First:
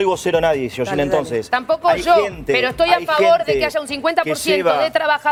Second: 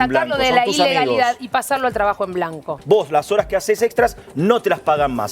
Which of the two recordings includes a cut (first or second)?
second